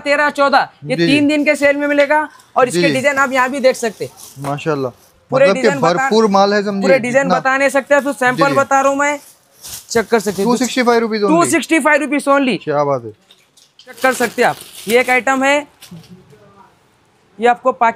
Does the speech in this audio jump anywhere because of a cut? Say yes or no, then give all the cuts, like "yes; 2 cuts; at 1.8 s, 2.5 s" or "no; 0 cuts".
no; 0 cuts